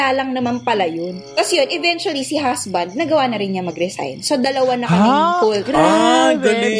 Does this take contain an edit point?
yes; 1 cut; at 1.2 s

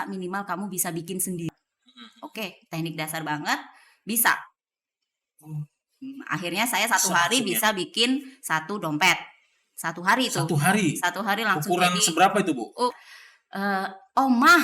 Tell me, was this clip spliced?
yes; 2 cuts; at 1.5 s, 13.0 s

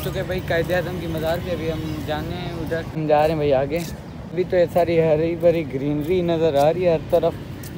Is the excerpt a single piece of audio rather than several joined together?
yes; 0 cuts

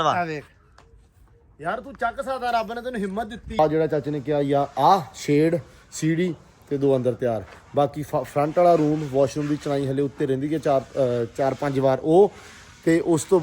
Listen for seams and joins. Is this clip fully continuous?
no; 1 cut; at 3.6 s

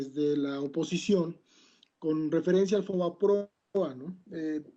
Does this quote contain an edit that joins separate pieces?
no; 0 cuts

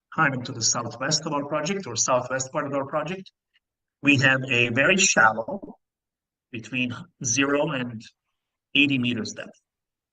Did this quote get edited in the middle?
no; 0 cuts

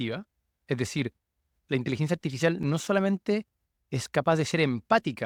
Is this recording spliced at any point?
no; 0 cuts

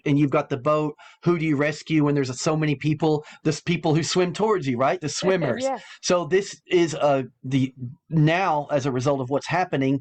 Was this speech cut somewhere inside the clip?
no; 0 cuts

